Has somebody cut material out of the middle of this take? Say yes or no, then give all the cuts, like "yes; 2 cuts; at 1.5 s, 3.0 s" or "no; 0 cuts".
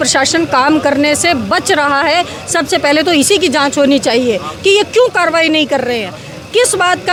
no; 0 cuts